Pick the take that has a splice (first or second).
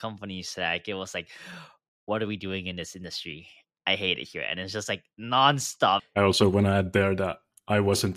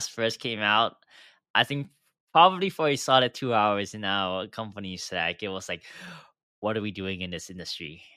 first